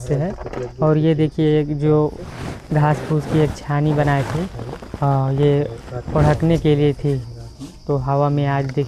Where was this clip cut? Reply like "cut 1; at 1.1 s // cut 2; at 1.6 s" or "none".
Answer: none